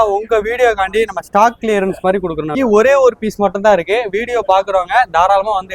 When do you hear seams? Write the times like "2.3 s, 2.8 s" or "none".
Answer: 2.6 s